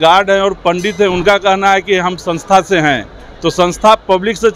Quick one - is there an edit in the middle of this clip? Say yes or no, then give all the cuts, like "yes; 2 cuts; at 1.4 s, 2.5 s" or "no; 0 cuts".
no; 0 cuts